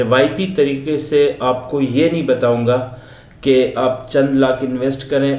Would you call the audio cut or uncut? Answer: uncut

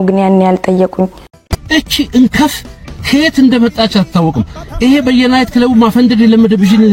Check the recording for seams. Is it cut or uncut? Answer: cut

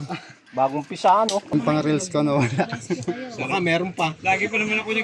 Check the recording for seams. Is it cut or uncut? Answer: cut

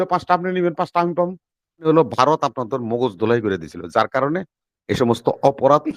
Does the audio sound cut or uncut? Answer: cut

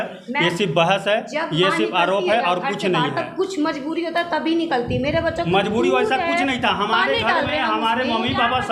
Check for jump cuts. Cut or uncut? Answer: uncut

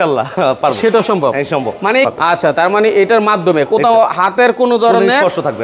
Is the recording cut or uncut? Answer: cut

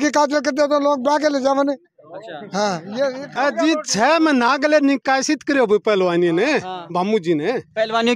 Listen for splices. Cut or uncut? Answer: cut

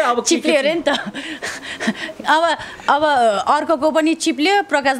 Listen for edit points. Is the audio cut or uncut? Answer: uncut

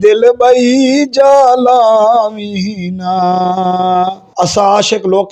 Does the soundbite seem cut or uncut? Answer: cut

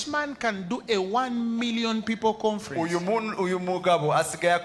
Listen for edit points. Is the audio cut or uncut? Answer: uncut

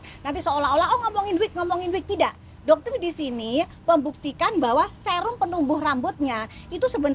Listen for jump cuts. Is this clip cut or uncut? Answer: uncut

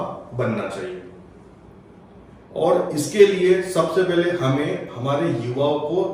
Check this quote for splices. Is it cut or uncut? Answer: uncut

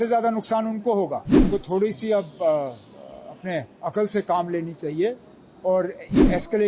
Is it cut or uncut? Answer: cut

